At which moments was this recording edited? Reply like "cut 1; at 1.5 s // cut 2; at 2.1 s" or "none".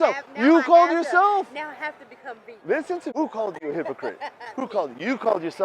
cut 1; at 3.1 s